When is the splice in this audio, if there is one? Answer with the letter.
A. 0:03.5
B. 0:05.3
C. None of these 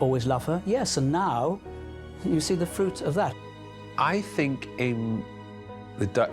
A